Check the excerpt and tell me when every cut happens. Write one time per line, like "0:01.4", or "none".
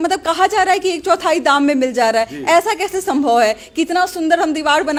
none